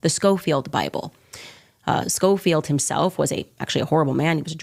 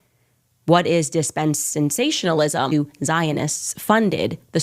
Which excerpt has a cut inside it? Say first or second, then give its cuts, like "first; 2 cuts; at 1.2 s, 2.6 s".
second; 1 cut; at 2.7 s